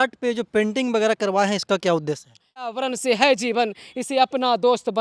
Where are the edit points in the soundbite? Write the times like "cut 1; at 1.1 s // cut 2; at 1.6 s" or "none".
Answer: cut 1; at 2.8 s

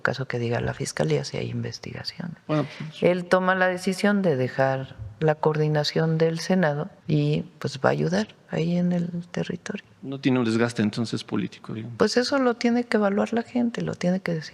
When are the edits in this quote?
cut 1; at 6.9 s

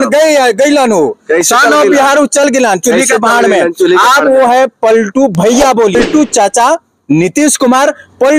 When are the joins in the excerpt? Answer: cut 1; at 6.0 s

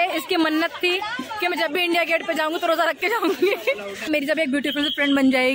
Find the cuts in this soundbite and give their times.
cut 1; at 4.1 s

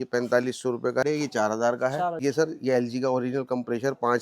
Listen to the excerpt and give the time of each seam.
cut 1; at 1.0 s // cut 2; at 2.2 s

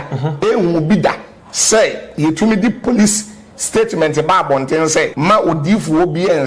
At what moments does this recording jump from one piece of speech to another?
cut 1; at 5.1 s

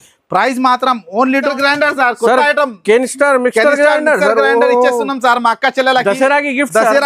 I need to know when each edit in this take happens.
cut 1; at 1.5 s

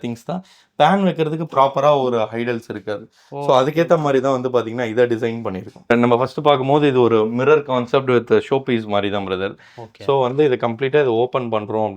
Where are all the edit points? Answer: cut 1; at 5.7 s

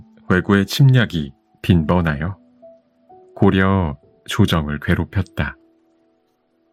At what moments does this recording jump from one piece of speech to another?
none

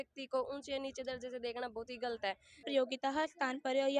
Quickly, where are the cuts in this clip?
cut 1; at 2.6 s

